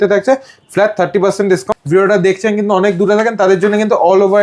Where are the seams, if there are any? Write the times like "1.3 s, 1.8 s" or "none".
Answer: 1.7 s